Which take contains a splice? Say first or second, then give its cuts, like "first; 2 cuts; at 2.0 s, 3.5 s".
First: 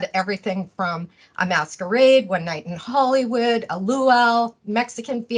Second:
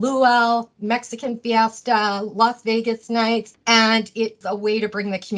second; 2 cuts; at 3.5 s, 4.4 s